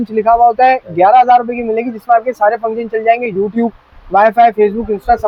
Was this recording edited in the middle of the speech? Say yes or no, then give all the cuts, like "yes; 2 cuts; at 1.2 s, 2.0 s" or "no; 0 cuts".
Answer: no; 0 cuts